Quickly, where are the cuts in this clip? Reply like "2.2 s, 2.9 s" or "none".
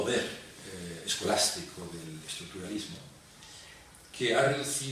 1.8 s